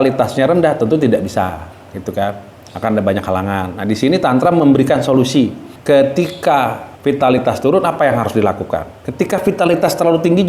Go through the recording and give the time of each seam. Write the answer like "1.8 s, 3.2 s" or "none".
5.7 s, 6.9 s